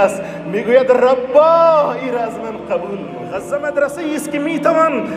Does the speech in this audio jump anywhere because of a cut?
yes; 1 cut; at 3.3 s

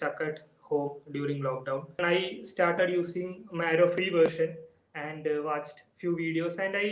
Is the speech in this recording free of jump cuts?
no; 1 cut; at 2.0 s

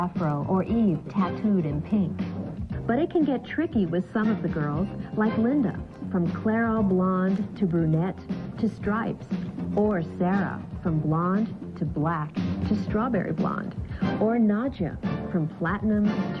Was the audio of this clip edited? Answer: yes; 1 cut; at 8.1 s

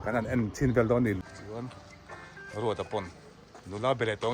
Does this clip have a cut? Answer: yes; 1 cut; at 1.2 s

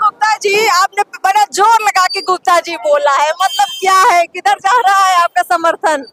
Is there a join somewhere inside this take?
no; 0 cuts

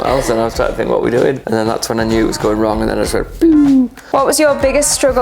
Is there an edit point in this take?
yes; 2 cuts; at 1.5 s, 3.9 s

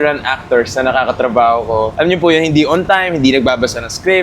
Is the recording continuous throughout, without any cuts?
no; 1 cut; at 1.9 s

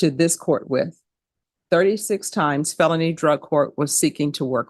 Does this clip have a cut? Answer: no; 0 cuts

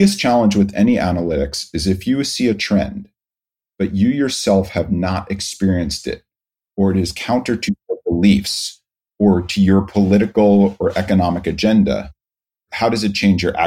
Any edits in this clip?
yes; 1 cut; at 12.7 s

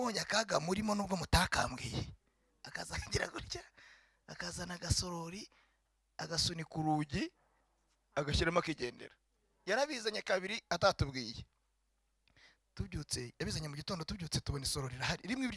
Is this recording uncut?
yes; 0 cuts

